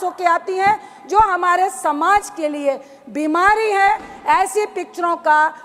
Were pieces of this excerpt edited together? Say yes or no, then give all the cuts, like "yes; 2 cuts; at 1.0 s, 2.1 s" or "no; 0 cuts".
no; 0 cuts